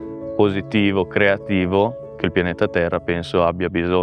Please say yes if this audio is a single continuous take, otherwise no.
yes